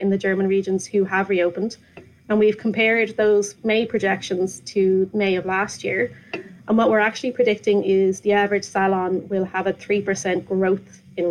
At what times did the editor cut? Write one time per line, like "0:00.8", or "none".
none

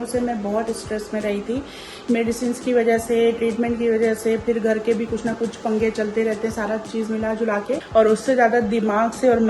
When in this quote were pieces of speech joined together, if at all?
0:07.8

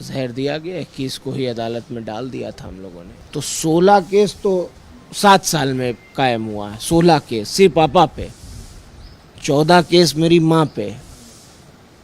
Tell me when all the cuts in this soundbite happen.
0:03.1

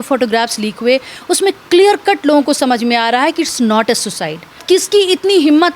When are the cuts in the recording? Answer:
0:04.6

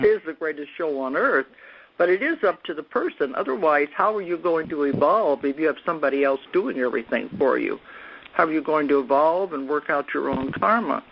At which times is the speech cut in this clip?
none

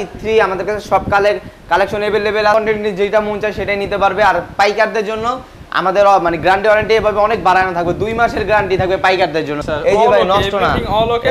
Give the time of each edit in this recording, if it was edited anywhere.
0:02.5
0:09.6

